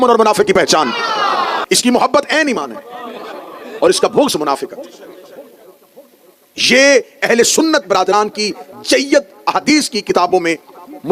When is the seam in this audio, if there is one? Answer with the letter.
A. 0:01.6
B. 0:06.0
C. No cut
C